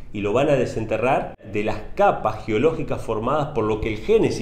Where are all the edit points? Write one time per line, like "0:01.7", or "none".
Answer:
0:01.5